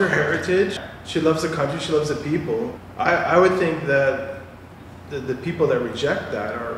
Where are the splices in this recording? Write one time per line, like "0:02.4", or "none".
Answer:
0:00.8
0:02.8